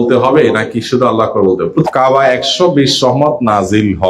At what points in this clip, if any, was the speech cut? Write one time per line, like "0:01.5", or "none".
0:01.9